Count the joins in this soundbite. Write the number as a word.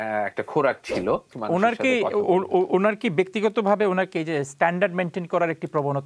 one